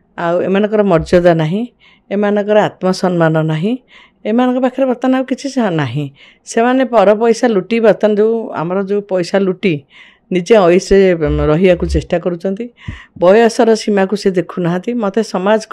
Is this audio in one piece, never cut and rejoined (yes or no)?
yes